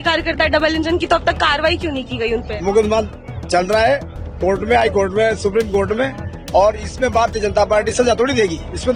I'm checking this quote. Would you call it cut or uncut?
uncut